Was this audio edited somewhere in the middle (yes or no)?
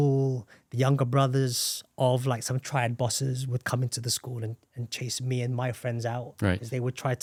no